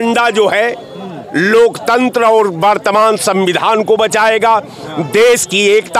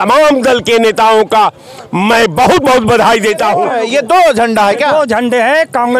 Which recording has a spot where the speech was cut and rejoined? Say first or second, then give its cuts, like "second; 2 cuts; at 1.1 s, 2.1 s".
second; 1 cut; at 3.6 s